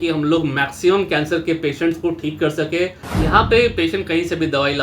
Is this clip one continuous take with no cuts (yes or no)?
no